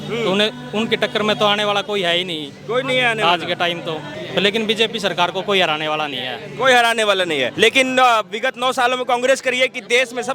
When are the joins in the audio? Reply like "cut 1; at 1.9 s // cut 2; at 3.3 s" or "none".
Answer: cut 1; at 4.2 s // cut 2; at 7.5 s